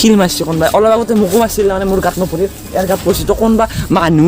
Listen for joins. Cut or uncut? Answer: uncut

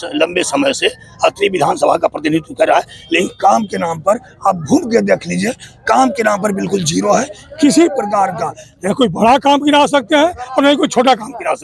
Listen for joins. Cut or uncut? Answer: uncut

